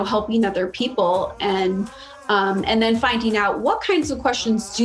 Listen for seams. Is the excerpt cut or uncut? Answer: uncut